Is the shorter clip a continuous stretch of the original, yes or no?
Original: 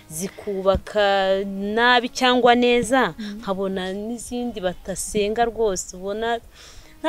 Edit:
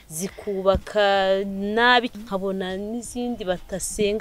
no